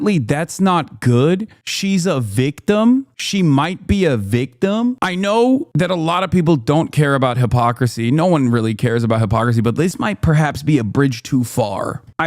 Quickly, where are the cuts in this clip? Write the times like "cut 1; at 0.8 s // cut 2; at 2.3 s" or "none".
cut 1; at 5.0 s // cut 2; at 5.7 s